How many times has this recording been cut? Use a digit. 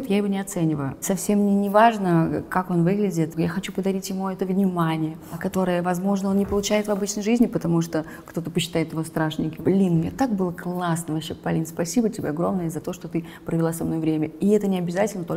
4